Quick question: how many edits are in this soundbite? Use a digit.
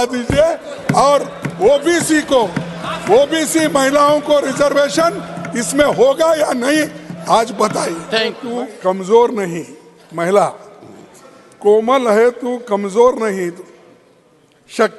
1